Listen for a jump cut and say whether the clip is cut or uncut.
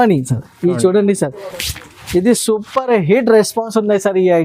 uncut